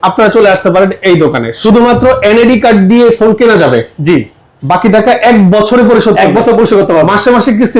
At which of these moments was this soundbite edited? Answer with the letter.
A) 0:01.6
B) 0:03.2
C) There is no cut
A